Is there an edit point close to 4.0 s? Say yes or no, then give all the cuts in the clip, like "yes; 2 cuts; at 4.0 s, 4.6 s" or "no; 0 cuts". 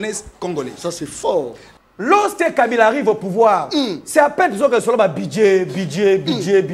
no; 1 cut; at 1.6 s